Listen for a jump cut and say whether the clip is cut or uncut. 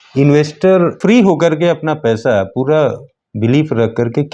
cut